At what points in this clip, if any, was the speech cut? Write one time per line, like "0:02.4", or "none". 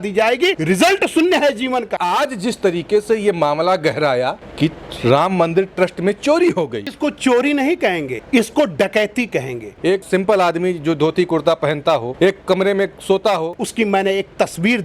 0:01.9
0:07.0
0:09.7
0:13.6

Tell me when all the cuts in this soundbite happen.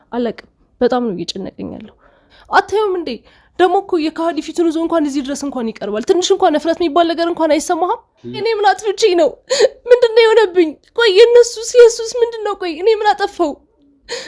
0:02.2
0:08.3

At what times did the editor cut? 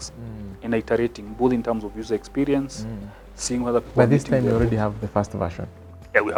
none

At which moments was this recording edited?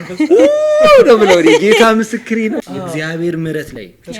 0:02.6

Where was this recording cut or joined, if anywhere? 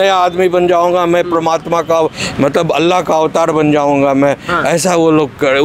none

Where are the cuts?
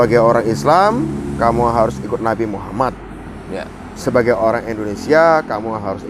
none

